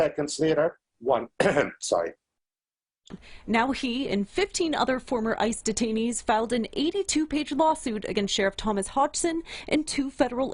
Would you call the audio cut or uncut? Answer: cut